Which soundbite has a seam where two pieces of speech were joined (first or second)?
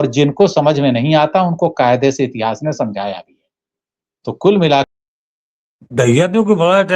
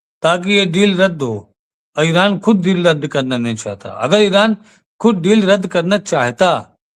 first